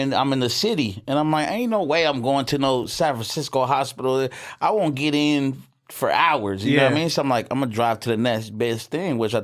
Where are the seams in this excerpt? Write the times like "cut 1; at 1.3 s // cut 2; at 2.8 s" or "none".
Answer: none

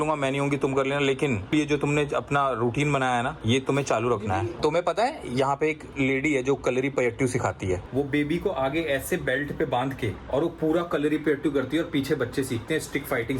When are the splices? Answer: cut 1; at 4.5 s // cut 2; at 7.9 s // cut 3; at 10.2 s

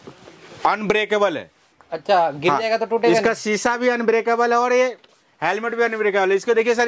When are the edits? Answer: none

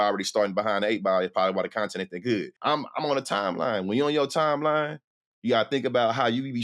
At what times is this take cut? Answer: cut 1; at 2.5 s

